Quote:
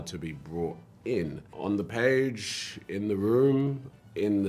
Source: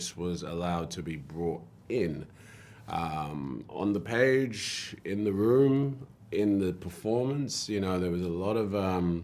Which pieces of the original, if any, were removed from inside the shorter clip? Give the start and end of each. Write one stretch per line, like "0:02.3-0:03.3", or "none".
0:02.3-0:03.7